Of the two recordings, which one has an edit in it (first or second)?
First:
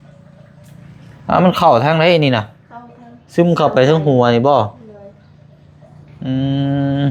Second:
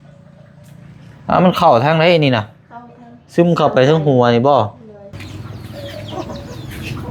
second